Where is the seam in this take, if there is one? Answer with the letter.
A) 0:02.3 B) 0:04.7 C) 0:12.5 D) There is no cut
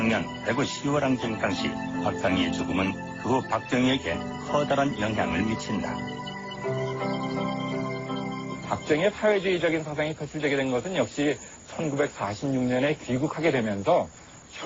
D